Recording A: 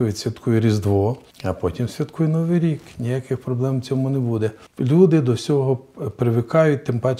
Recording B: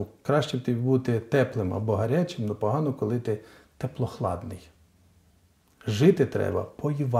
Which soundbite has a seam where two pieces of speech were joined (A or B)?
A